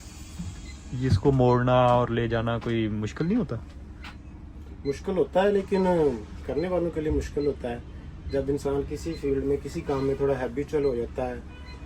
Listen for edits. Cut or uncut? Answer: uncut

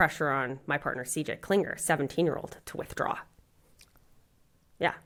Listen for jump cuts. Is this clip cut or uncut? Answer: uncut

